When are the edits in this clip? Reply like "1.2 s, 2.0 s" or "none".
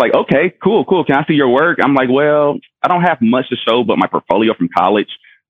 none